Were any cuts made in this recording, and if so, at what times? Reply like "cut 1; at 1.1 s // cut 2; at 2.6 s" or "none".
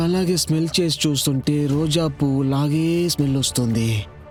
none

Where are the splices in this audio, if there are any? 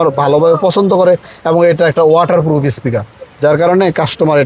none

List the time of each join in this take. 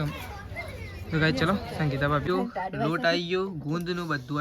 cut 1; at 2.3 s

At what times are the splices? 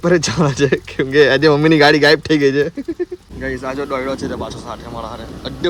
cut 1; at 3.3 s

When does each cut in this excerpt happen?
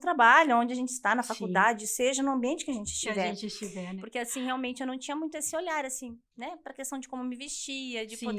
cut 1; at 3.9 s

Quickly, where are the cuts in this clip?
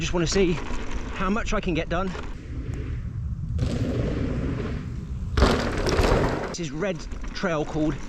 cut 1; at 2.4 s // cut 2; at 6.6 s

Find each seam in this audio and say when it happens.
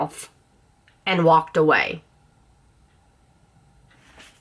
none

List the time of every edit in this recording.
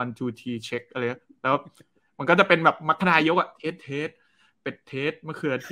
none

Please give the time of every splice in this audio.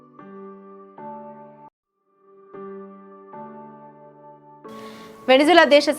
cut 1; at 1.9 s // cut 2; at 5.1 s

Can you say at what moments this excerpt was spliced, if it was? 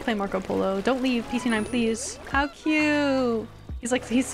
cut 1; at 2.3 s

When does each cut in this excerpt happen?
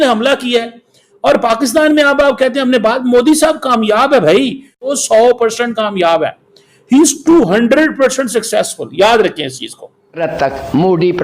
cut 1; at 10.2 s

